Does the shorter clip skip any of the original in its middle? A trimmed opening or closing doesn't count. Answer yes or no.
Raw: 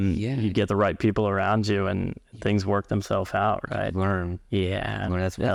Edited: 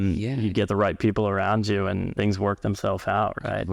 yes